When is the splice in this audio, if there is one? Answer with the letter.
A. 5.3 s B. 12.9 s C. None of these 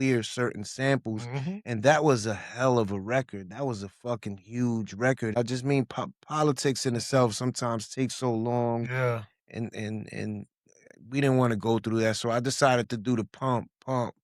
A